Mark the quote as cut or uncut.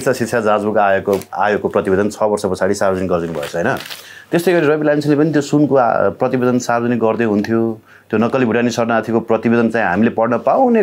uncut